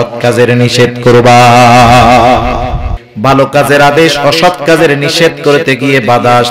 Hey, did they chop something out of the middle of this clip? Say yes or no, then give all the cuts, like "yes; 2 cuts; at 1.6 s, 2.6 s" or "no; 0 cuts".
yes; 1 cut; at 3.0 s